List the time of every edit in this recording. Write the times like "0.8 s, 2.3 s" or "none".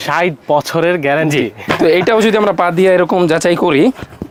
none